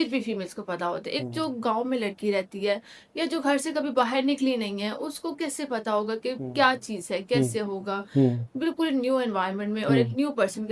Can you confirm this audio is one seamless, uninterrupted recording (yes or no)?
yes